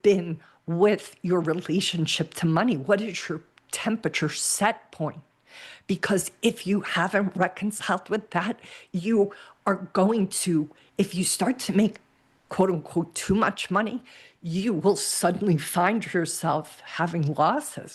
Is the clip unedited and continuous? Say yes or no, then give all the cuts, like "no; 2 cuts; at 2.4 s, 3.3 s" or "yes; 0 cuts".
yes; 0 cuts